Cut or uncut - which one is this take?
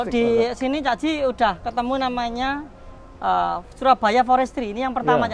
uncut